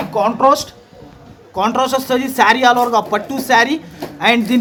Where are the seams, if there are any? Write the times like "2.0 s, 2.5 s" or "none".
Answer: none